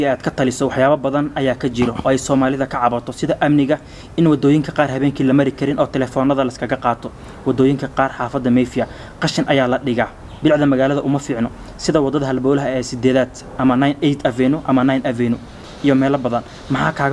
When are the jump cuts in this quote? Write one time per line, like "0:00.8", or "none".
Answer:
none